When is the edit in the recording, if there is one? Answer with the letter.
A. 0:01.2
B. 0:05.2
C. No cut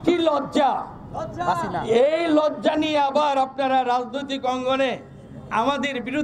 C